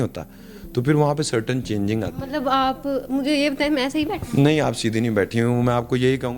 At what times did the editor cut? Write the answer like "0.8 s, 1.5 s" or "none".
none